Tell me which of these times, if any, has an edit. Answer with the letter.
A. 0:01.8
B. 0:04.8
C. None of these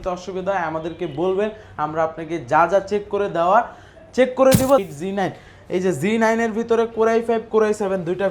B